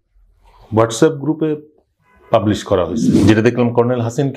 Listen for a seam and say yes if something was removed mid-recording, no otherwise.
yes